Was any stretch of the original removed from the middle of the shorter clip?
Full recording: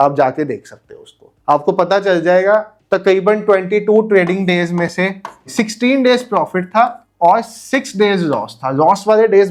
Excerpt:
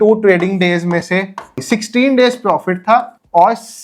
no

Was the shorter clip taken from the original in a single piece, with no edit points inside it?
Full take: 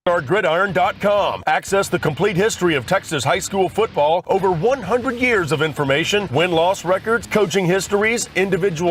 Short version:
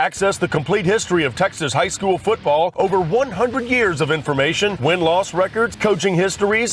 yes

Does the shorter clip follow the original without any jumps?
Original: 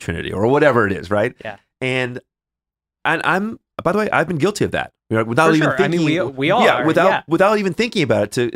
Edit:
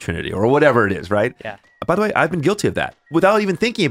no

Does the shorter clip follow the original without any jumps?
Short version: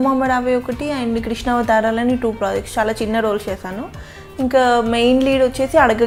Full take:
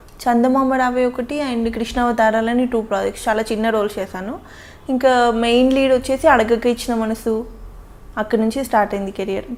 yes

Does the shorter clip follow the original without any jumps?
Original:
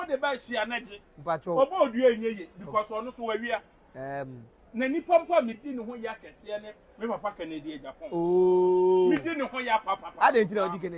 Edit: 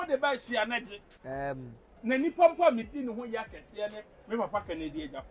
no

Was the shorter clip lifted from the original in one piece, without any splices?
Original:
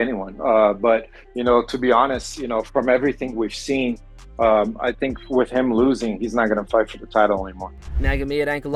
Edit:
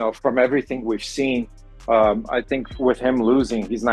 yes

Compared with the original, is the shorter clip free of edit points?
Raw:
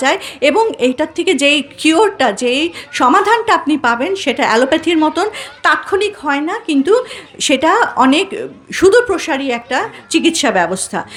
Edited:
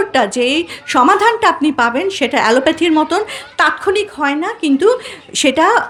yes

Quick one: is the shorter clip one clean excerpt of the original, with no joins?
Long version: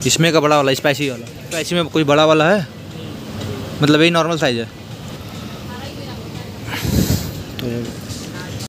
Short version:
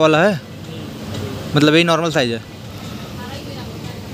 no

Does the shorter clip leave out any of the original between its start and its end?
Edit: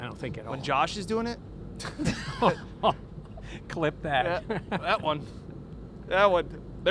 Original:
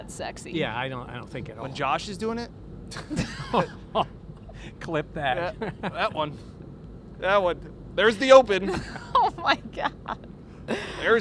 no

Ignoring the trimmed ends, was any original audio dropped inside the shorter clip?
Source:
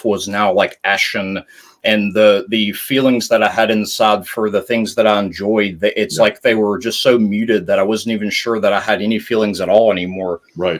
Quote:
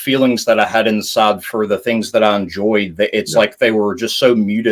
no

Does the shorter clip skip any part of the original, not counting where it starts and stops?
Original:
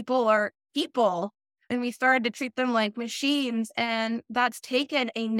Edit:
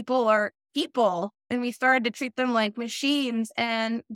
yes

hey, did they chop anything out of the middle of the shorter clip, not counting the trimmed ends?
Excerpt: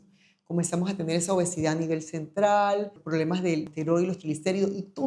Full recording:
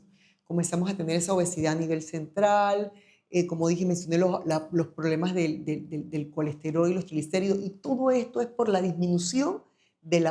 yes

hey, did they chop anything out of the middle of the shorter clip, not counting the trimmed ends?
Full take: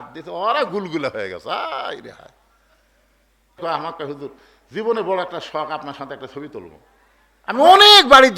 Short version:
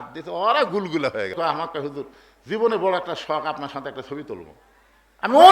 yes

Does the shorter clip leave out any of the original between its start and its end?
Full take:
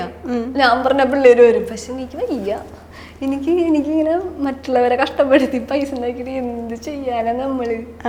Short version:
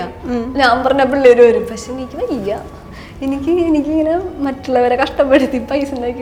no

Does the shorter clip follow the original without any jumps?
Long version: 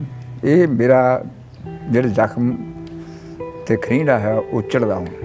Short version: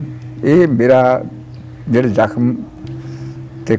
yes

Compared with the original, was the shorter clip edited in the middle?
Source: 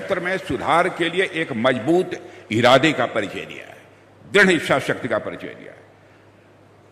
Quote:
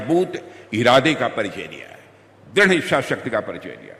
no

